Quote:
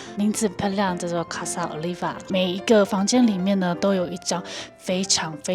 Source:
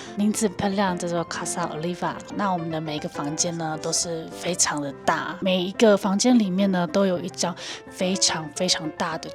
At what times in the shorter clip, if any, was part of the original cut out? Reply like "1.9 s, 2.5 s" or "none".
2.2 s

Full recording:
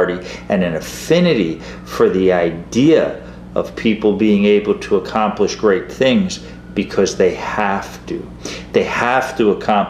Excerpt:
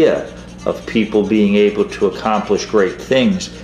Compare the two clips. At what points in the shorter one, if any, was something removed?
none

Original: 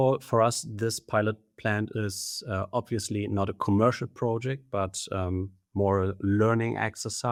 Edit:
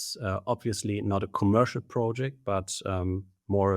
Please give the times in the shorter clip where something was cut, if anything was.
none

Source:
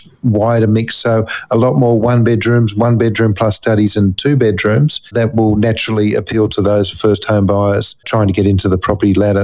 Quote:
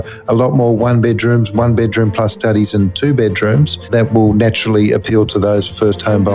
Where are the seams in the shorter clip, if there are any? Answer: none

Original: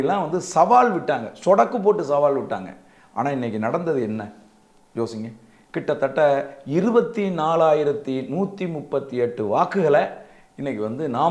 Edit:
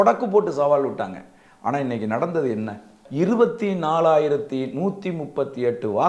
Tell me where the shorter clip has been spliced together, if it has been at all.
3.0 s

